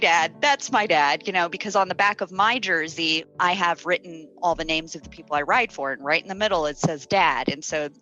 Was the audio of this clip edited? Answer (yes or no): yes